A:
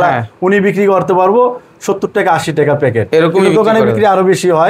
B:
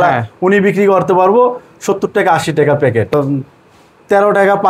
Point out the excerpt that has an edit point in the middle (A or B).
B